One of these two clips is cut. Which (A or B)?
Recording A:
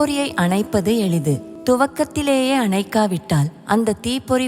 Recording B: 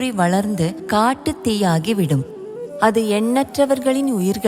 A